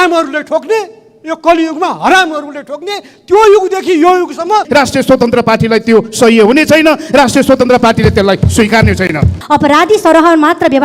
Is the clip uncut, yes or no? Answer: no